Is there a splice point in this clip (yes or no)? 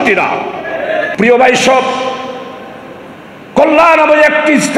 yes